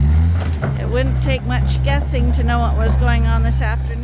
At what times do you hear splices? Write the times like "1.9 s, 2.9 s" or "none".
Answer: none